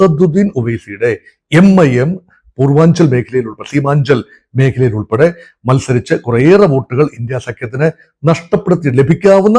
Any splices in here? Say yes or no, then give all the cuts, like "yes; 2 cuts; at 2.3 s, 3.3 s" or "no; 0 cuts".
no; 0 cuts